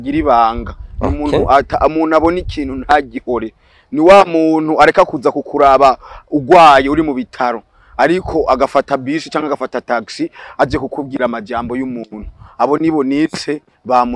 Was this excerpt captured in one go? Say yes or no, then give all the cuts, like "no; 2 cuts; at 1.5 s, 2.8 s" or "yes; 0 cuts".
yes; 0 cuts